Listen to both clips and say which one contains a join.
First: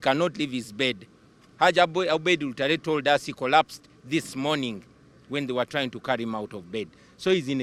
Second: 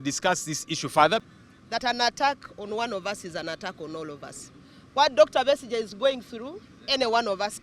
second; 1 cut; at 1.2 s

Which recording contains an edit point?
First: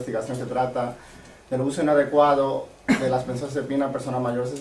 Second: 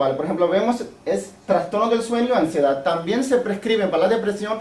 second; 1 cut; at 3.0 s

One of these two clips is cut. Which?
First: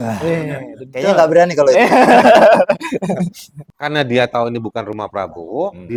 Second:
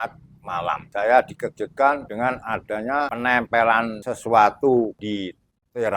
second; 5 cuts; at 0.8 s, 2.1 s, 3.1 s, 4.0 s, 5.0 s

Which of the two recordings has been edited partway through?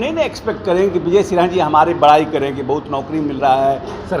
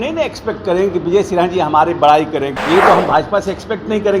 second; 1 cut; at 2.5 s

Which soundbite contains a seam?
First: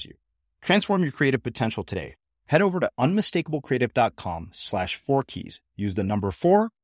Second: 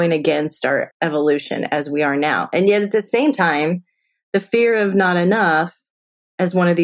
second; 1 cut; at 0.9 s

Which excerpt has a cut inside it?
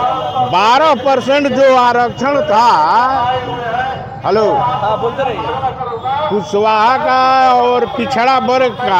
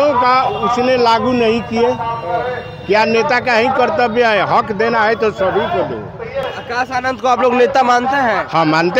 second; 1 cut; at 6.5 s

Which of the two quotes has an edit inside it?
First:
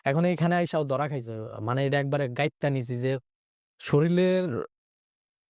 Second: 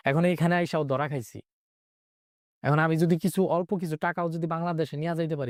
first; 1 cut; at 1.5 s

